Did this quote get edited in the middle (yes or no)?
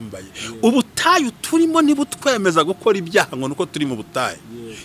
no